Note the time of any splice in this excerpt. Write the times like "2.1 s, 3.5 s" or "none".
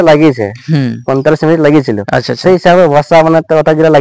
none